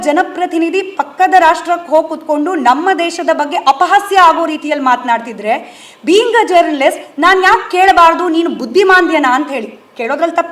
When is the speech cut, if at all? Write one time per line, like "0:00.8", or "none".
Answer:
none

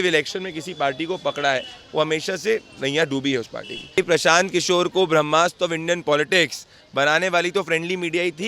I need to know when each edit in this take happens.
0:04.0

